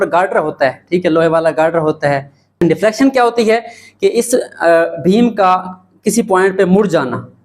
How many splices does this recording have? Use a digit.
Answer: 1